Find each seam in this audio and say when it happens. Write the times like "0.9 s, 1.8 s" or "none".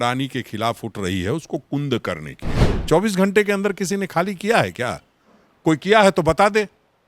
2.7 s

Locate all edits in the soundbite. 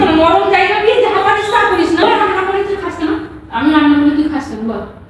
2.0 s

